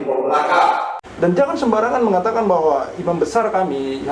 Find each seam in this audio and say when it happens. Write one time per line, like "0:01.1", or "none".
0:01.0